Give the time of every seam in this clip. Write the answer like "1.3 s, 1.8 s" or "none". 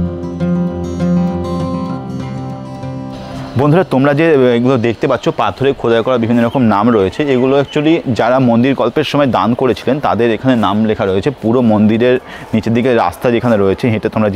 none